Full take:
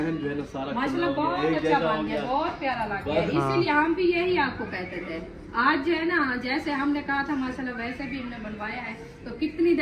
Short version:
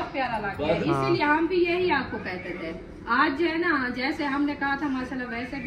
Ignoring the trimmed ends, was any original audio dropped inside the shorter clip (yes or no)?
no